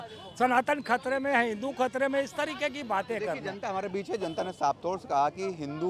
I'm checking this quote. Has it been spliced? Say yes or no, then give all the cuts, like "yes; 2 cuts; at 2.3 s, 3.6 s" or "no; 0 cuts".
no; 0 cuts